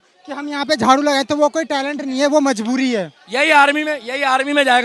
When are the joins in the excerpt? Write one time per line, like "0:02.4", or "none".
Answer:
0:03.2